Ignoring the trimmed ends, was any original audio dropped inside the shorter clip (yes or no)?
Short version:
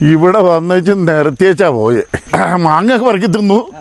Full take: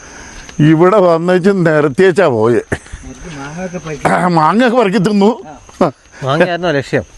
yes